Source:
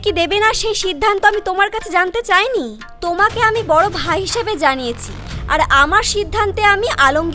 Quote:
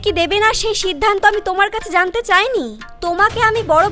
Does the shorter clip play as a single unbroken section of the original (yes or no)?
yes